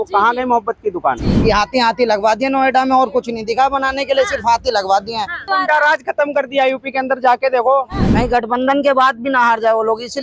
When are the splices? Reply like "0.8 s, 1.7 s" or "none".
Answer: 1.3 s, 5.5 s, 8.0 s